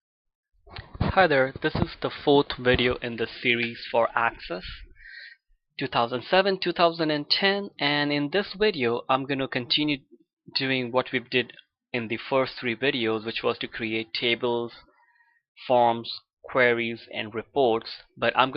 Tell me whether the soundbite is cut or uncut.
uncut